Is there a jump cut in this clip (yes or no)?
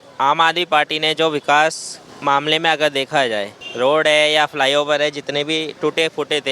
yes